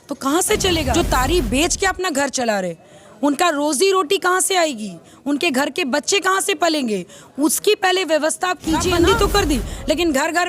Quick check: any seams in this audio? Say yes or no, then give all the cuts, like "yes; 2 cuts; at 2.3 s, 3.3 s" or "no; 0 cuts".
yes; 2 cuts; at 0.9 s, 8.9 s